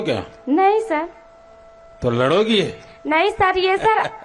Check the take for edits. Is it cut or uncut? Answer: uncut